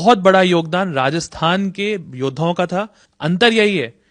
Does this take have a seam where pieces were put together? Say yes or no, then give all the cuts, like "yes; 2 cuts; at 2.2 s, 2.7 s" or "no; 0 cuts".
yes; 1 cut; at 3.0 s